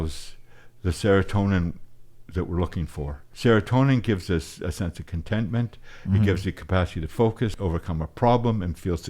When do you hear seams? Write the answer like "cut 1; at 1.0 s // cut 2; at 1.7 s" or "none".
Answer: cut 1; at 3.2 s // cut 2; at 7.6 s